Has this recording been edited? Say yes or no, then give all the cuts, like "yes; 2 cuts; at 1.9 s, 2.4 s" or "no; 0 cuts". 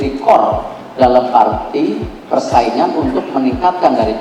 no; 0 cuts